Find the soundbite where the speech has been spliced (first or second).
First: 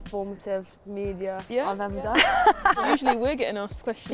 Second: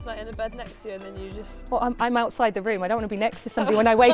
first